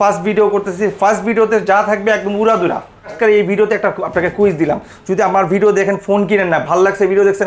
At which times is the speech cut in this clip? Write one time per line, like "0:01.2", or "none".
0:03.1